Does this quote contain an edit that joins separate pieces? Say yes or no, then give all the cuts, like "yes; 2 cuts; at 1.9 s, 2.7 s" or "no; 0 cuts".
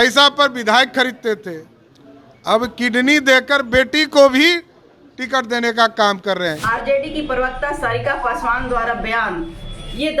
yes; 1 cut; at 6.6 s